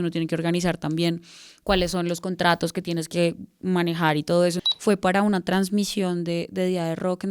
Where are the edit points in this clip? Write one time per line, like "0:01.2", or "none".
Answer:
0:04.7